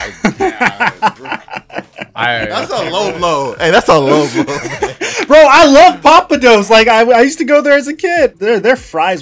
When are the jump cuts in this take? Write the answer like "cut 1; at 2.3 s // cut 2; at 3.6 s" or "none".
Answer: cut 1; at 8.3 s